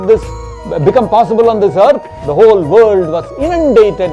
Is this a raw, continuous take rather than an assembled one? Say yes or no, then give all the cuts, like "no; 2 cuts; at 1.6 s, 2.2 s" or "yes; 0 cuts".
no; 1 cut; at 2.1 s